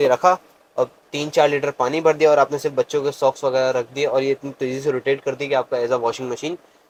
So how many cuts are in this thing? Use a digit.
0